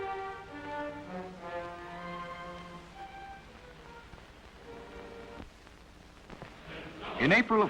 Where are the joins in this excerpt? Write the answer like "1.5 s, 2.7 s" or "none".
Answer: none